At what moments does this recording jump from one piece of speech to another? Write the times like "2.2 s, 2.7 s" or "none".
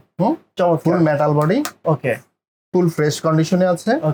none

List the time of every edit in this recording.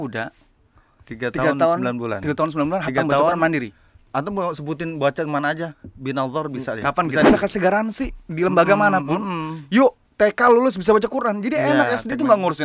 7.3 s

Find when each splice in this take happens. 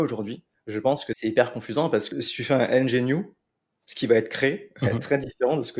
1.1 s, 2.1 s

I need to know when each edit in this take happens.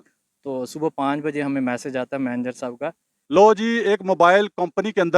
3.1 s

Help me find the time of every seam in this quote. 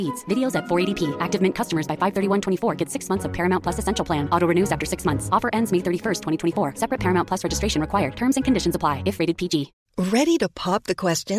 9.8 s

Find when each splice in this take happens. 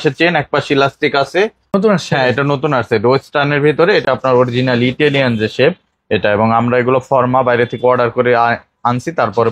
1.7 s, 4.0 s

